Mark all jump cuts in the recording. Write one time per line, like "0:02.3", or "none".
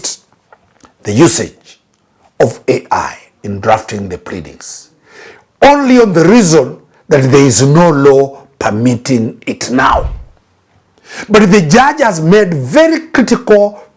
none